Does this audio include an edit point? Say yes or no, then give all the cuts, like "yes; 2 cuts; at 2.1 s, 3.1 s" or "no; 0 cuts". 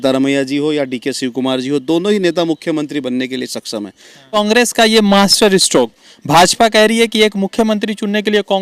yes; 1 cut; at 4.4 s